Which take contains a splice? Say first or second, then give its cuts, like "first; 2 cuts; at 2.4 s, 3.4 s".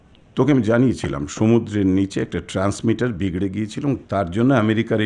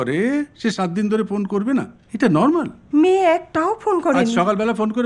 second; 1 cut; at 2.8 s